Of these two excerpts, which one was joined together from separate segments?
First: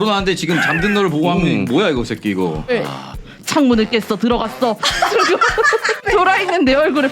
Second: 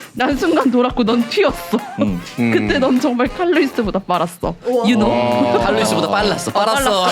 first; 2 cuts; at 3.1 s, 6.0 s

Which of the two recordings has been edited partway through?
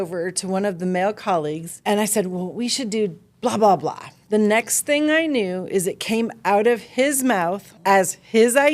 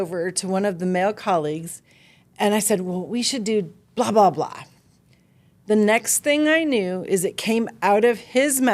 first; 3 cuts; at 1.7 s, 4.1 s, 7.7 s

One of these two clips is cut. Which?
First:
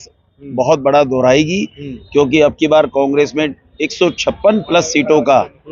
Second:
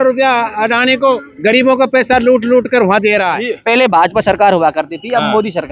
second; 1 cut; at 3.5 s

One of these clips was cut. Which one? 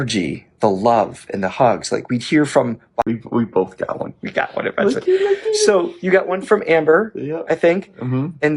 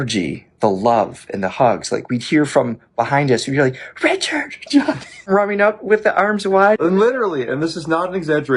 first; 1 cut; at 3.1 s

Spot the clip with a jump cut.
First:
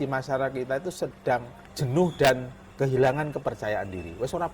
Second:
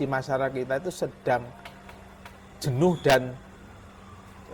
first; 2 cuts; at 1.6 s, 2.6 s

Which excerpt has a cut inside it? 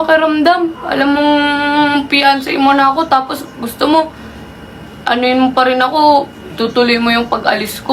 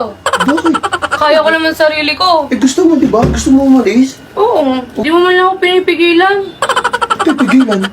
second; 1 cut; at 4.9 s

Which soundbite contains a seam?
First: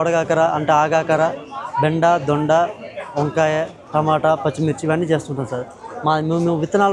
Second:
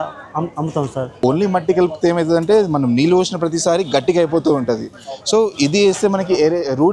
second; 1 cut; at 1.2 s

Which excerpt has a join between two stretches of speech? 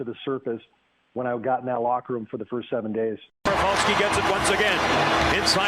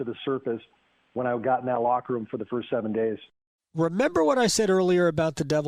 first; 1 cut; at 3.4 s

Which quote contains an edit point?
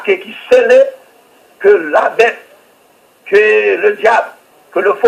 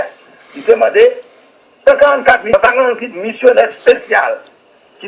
second; 1 cut; at 2.5 s

